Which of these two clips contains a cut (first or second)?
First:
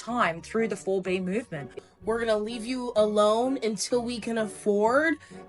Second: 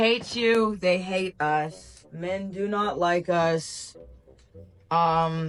first